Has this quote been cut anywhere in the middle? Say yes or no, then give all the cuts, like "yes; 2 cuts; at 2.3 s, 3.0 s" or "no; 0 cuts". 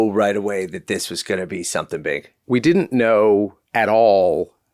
yes; 1 cut; at 2.3 s